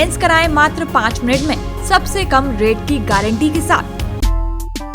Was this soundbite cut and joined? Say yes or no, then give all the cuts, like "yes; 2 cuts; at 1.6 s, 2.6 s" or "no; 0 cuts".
yes; 1 cut; at 4.0 s